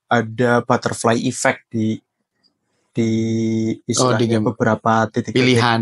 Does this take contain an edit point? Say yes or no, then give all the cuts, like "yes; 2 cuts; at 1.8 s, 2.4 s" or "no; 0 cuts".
no; 0 cuts